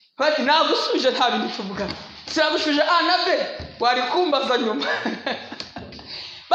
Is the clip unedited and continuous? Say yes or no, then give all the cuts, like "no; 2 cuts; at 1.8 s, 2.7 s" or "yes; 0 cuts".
yes; 0 cuts